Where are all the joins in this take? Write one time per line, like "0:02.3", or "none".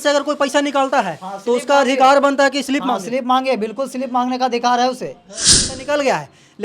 0:05.6